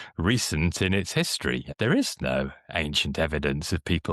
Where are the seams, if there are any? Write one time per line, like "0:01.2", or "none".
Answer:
0:01.7